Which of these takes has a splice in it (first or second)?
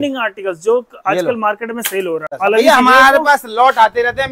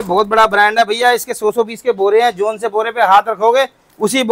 first